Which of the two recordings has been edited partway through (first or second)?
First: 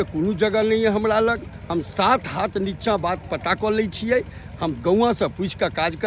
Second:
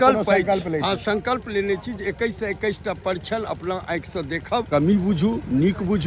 second